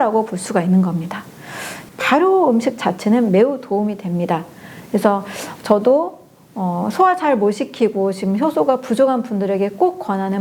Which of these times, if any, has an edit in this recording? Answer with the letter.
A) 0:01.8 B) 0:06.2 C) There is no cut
A